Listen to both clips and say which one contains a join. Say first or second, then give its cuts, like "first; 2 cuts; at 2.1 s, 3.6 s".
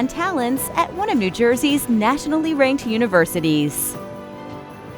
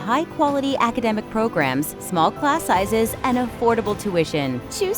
first; 1 cut; at 3.7 s